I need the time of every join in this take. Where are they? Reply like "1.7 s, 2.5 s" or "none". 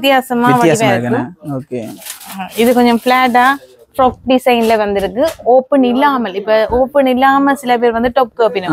none